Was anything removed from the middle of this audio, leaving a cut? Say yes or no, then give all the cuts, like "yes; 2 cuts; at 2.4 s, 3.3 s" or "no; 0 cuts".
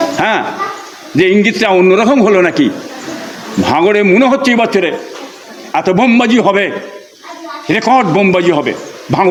no; 0 cuts